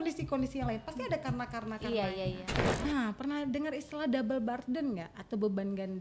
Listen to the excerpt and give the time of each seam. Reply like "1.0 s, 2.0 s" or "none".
2.8 s